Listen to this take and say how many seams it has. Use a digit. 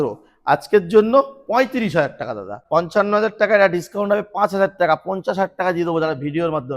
1